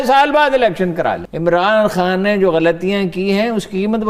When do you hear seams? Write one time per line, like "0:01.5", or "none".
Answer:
0:01.3